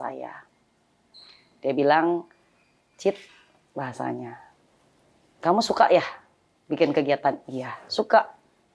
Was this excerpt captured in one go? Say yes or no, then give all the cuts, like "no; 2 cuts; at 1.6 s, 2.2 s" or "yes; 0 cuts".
yes; 0 cuts